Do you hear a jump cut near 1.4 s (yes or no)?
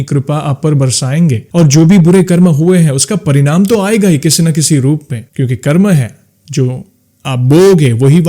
yes